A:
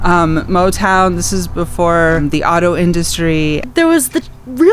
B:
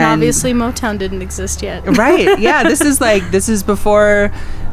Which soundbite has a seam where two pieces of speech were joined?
A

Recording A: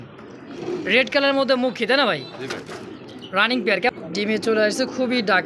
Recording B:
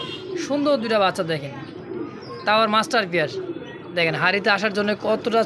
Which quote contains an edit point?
A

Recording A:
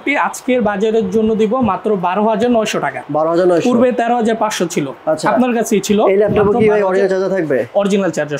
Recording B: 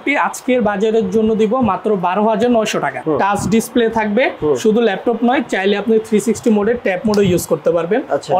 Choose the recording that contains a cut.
B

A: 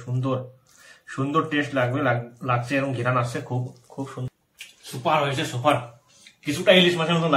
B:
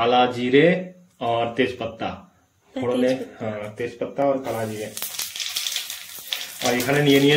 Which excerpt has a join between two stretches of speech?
A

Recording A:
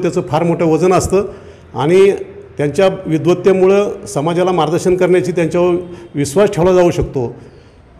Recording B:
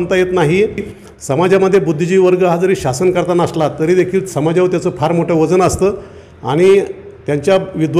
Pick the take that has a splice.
B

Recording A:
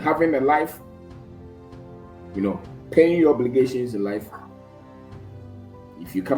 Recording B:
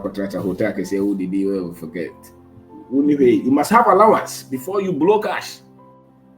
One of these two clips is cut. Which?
B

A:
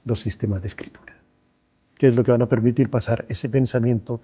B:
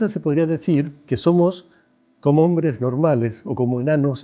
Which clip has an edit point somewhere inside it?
B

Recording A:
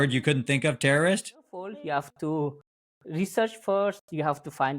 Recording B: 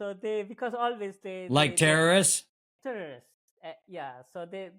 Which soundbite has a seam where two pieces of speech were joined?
A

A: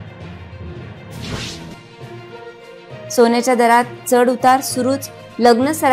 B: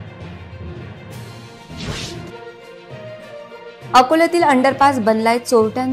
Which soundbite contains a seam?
B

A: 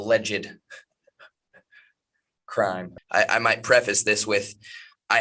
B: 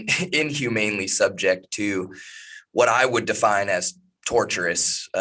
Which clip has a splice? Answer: A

